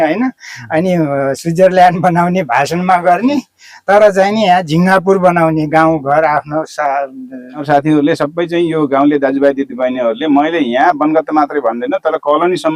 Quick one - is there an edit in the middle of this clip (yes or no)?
yes